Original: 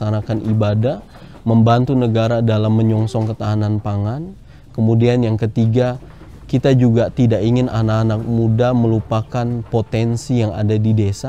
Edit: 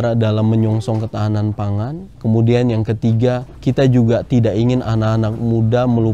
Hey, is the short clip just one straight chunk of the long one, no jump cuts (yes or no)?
no